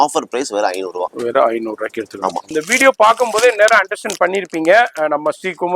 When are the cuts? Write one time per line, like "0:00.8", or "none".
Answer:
0:02.5